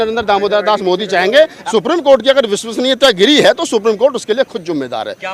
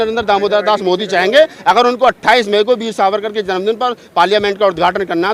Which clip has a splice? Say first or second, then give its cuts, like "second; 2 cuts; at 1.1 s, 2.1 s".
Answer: first; 1 cut; at 1.6 s